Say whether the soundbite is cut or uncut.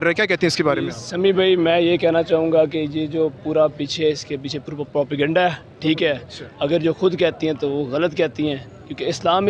uncut